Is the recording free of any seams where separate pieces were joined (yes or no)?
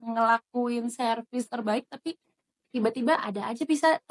yes